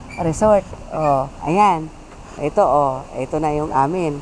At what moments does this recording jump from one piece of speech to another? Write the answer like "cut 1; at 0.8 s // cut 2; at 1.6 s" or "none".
cut 1; at 2.4 s